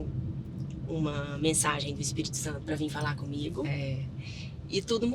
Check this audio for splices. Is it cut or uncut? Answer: uncut